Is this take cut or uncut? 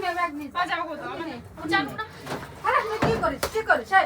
cut